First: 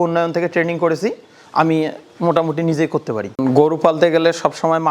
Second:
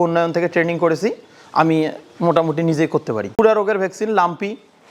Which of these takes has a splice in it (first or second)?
first